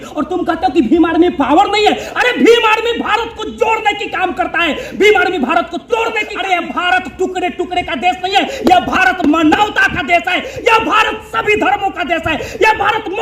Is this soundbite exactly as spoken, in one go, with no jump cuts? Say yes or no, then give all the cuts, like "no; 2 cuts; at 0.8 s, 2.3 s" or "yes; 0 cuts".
no; 1 cut; at 6.3 s